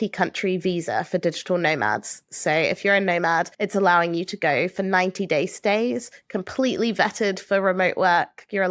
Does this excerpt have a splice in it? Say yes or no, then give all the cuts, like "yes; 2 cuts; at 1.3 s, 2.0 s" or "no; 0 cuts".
no; 0 cuts